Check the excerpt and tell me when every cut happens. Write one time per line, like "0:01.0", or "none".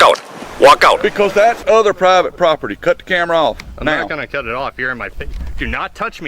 0:01.0